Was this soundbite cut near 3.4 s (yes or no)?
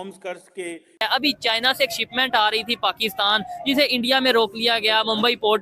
no